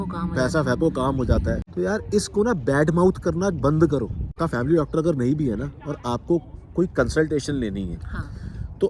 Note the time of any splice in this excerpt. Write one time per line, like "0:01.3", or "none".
0:01.6
0:04.2